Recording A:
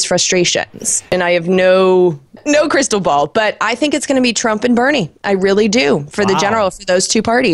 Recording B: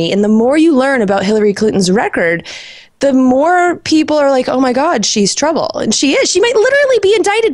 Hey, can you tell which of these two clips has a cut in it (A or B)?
A